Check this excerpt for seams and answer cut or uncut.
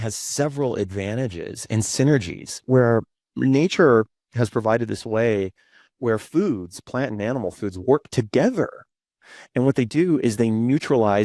uncut